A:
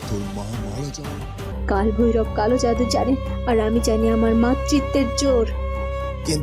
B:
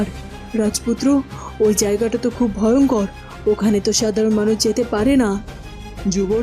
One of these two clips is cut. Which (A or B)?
A